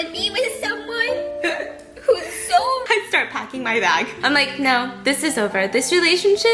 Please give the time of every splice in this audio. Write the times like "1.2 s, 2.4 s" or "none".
2.8 s